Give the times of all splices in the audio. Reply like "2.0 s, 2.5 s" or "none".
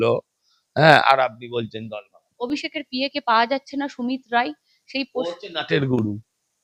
none